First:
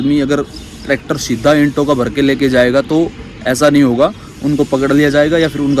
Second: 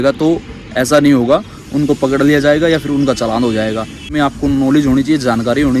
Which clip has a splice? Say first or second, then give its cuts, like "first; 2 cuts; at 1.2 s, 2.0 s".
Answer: second; 1 cut; at 4.1 s